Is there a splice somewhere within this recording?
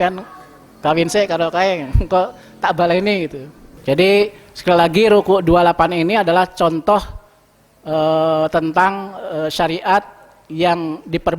yes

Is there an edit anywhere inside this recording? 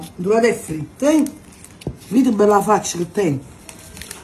no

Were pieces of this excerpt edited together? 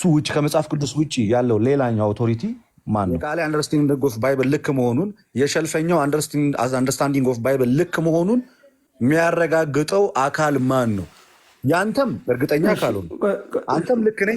yes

